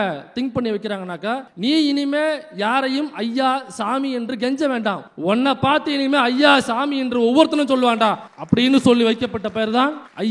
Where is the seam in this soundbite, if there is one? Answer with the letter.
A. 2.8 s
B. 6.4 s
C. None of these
C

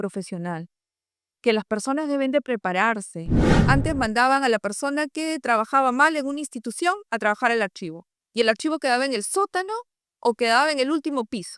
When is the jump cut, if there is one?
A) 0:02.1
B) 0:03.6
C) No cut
B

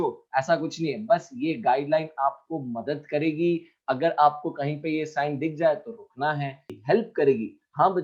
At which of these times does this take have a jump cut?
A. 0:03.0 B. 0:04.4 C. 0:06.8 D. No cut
C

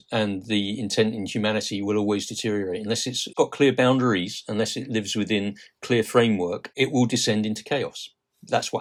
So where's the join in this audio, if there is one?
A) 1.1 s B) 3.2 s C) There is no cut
C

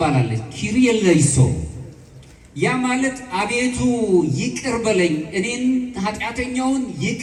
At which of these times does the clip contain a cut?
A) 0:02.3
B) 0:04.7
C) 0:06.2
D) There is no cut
D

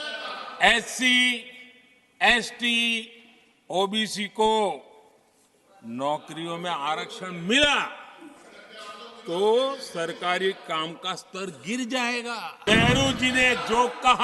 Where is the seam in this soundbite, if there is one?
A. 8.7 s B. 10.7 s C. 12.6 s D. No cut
C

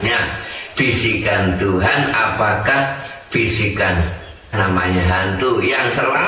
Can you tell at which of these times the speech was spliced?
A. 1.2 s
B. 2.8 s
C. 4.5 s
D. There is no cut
C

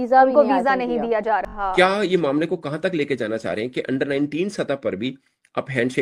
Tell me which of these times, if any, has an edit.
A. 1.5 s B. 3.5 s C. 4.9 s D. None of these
A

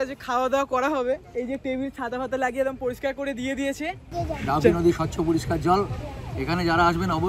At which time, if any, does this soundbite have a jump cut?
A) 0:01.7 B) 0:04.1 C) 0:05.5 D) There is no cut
B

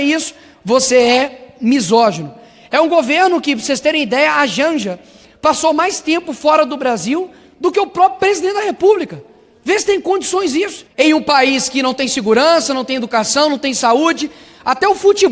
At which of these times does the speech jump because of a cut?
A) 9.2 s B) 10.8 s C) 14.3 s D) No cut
B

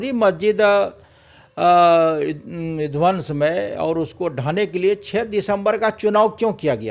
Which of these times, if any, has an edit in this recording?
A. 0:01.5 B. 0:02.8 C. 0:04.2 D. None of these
D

